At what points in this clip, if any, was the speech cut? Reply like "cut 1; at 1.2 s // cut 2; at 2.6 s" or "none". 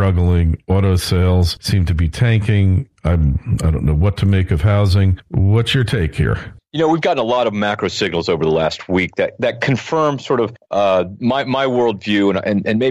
cut 1; at 3.7 s

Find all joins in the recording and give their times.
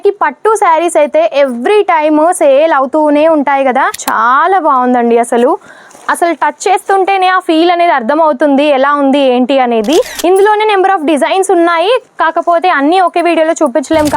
cut 1; at 4.0 s // cut 2; at 10.1 s

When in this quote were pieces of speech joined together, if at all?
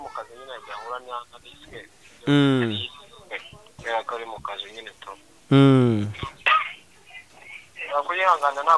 cut 1; at 6.4 s

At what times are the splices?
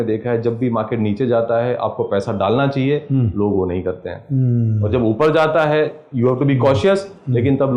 none

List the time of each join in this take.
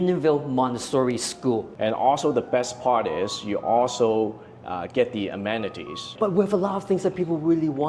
cut 1; at 1.7 s // cut 2; at 6.1 s

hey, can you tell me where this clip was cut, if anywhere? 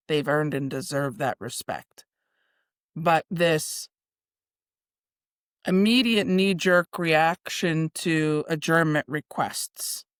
none

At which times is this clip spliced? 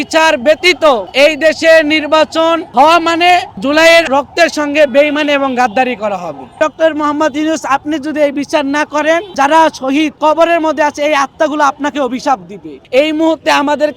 cut 1; at 1.1 s // cut 2; at 2.6 s // cut 3; at 4.1 s // cut 4; at 6.4 s // cut 5; at 9.3 s // cut 6; at 10.1 s // cut 7; at 12.7 s

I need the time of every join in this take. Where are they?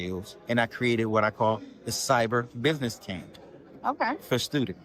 none

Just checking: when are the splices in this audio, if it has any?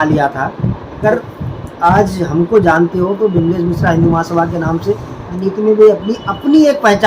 cut 1; at 1.0 s // cut 2; at 5.3 s

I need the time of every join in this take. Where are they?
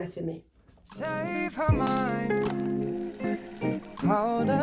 cut 1; at 1.0 s

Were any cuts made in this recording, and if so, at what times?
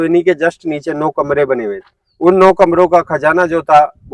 none

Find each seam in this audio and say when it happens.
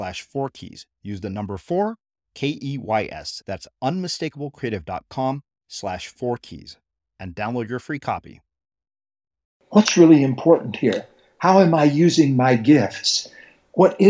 cut 1; at 9.6 s

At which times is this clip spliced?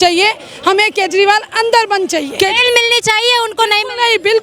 cut 1; at 2.4 s

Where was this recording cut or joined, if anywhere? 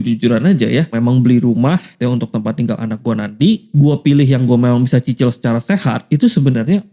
cut 1; at 0.9 s // cut 2; at 1.9 s // cut 3; at 3.7 s // cut 4; at 6.0 s

